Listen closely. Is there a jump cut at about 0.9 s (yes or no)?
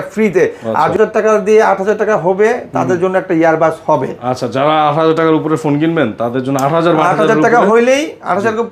yes